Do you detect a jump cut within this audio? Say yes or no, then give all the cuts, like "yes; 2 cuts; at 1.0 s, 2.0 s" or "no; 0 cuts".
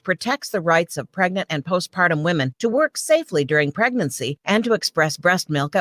no; 0 cuts